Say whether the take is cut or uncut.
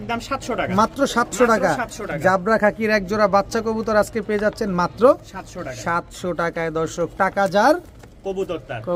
uncut